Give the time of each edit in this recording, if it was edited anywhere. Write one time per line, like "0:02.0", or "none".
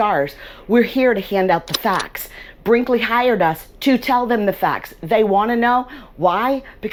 none